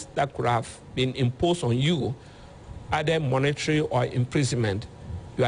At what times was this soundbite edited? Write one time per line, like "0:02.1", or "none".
none